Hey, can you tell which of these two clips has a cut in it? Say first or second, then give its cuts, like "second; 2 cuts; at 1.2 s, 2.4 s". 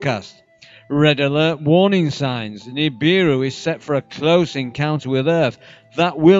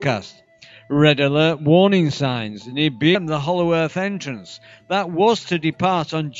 first; 1 cut; at 3.1 s